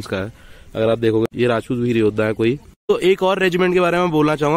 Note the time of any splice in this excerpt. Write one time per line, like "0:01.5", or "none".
0:02.7